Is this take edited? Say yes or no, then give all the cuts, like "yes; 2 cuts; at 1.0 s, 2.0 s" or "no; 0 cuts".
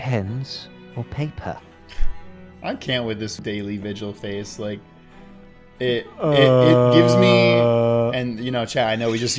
yes; 1 cut; at 3.4 s